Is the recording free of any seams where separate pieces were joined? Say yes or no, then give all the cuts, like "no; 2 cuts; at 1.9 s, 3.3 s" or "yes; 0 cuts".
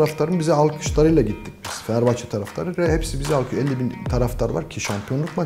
yes; 0 cuts